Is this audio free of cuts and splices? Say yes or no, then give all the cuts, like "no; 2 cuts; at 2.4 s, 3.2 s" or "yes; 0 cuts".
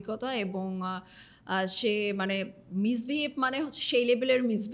yes; 0 cuts